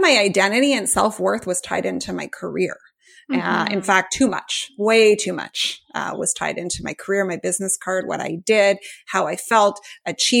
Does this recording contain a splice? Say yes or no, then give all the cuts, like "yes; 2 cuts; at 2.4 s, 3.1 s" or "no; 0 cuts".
no; 0 cuts